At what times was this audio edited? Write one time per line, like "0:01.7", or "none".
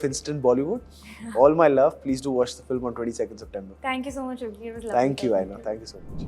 none